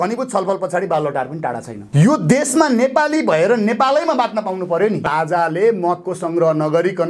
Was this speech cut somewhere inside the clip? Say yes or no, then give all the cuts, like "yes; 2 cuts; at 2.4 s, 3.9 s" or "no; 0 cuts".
yes; 1 cut; at 5.1 s